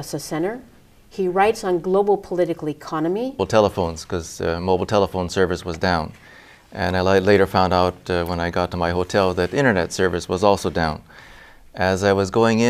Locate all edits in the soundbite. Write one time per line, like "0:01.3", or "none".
none